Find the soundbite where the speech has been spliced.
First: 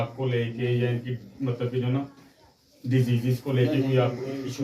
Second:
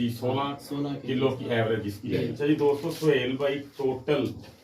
second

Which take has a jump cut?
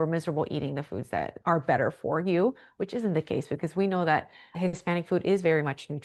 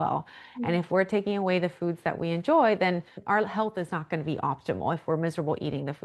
second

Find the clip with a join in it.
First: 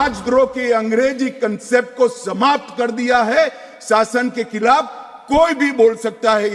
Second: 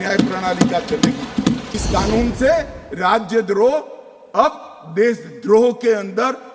second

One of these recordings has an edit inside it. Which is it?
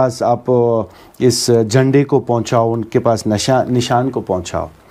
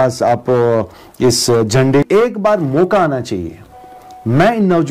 second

